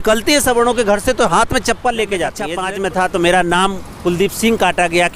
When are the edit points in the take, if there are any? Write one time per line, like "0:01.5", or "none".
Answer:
0:02.5